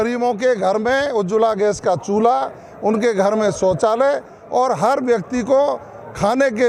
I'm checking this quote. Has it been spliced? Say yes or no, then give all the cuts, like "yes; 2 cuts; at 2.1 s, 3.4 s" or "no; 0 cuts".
no; 0 cuts